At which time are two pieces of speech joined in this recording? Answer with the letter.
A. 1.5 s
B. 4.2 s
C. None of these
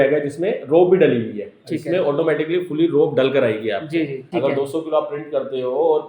B